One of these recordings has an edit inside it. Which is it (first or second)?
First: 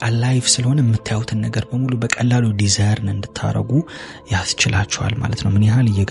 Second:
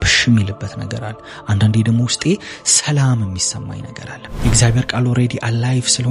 second